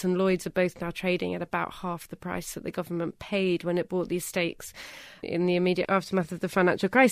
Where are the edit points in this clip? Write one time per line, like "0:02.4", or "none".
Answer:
0:05.9